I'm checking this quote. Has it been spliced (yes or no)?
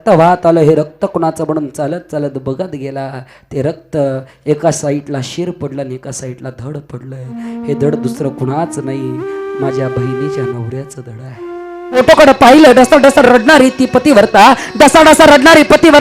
yes